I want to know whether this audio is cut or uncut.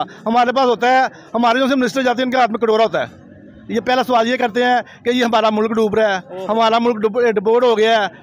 uncut